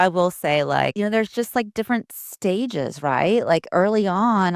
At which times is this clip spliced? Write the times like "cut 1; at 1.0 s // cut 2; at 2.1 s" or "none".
cut 1; at 0.9 s